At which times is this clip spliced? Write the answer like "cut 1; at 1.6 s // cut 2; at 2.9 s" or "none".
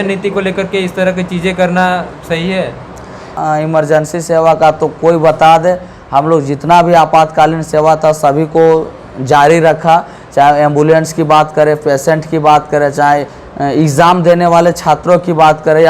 cut 1; at 3.2 s

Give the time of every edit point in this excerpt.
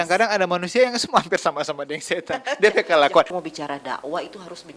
cut 1; at 3.3 s

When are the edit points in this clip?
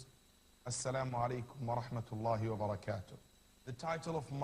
cut 1; at 1.9 s

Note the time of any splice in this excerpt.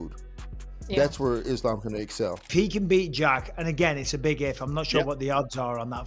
cut 1; at 2.4 s

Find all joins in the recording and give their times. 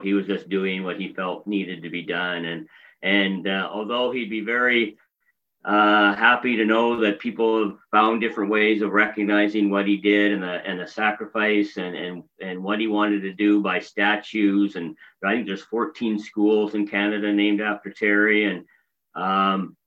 none

